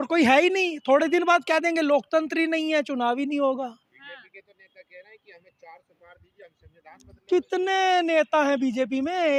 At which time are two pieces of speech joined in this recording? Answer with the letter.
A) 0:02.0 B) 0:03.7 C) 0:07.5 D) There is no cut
D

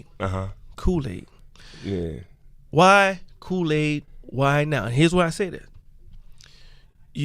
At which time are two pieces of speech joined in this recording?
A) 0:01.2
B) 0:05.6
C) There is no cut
B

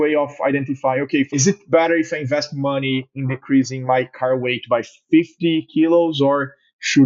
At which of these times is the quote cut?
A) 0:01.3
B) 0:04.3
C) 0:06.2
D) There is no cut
A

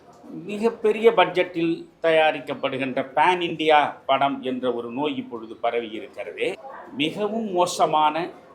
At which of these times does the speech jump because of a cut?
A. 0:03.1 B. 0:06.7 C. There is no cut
B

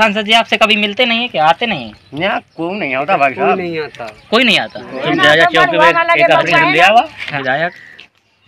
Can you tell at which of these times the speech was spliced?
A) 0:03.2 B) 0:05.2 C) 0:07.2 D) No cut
C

